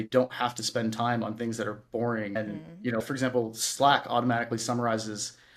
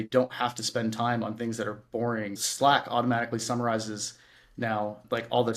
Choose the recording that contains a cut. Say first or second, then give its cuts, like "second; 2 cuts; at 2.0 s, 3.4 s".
second; 1 cut; at 2.3 s